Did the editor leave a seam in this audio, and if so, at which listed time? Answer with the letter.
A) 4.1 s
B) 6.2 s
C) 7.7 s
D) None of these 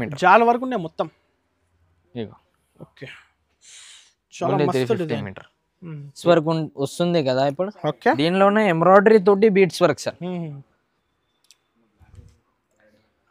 B